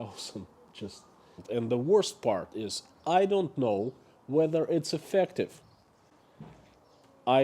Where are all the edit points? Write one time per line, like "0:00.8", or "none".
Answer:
0:01.4

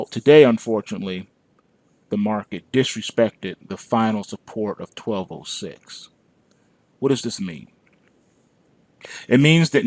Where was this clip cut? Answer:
0:03.5

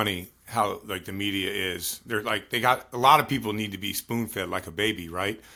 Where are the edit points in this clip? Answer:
none

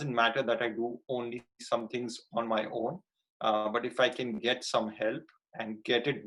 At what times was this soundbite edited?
none

